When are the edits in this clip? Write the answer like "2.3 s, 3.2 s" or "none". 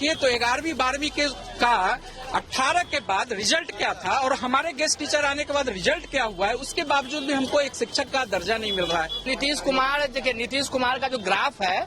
9.3 s

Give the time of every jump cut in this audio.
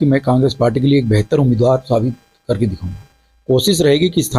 3.2 s

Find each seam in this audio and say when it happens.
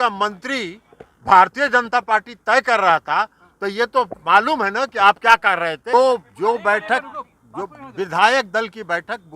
5.9 s

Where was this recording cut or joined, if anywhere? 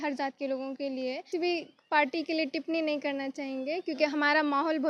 1.3 s

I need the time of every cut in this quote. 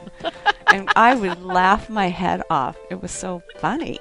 2.8 s

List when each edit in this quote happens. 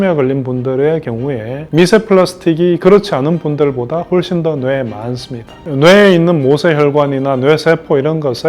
1.6 s, 5.7 s

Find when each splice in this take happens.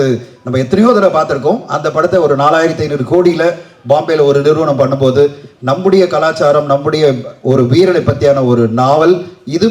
none

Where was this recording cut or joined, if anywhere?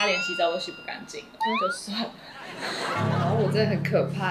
3.0 s

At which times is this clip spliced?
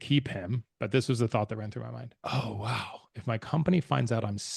2.1 s

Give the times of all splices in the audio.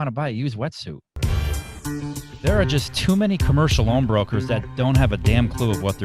1.1 s

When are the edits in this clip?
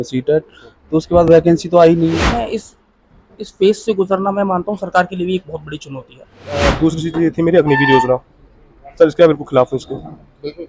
2.2 s, 6.7 s

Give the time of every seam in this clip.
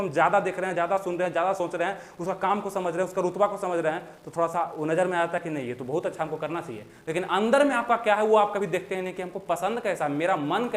none

